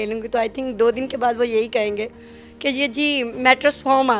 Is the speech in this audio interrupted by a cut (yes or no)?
no